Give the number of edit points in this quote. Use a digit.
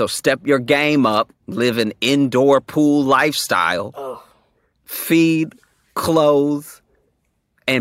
1